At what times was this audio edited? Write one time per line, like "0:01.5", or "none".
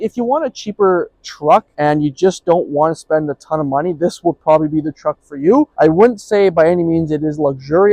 none